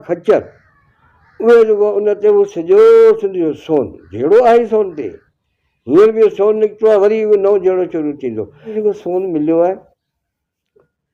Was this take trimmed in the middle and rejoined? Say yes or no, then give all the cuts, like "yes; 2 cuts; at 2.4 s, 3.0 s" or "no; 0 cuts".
yes; 1 cut; at 8.8 s